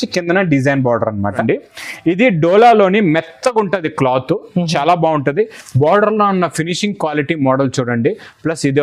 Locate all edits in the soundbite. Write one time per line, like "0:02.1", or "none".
0:01.4